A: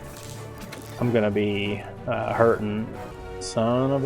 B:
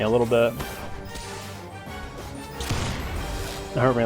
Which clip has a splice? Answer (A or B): A